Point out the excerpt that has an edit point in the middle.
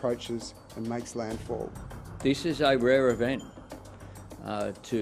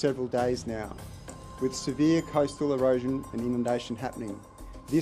first; 1 cut; at 2.1 s

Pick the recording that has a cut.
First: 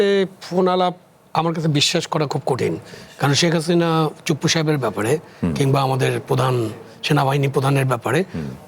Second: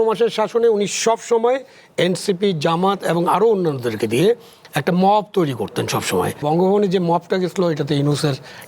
second; 1 cut; at 6.4 s

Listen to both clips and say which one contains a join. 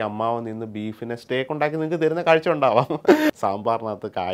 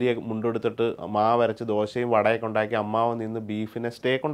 first; 1 cut; at 3.3 s

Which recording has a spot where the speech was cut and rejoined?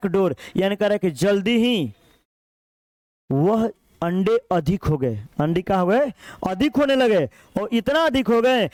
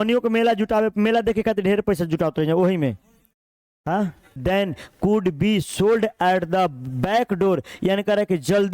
second; 1 cut; at 4.4 s

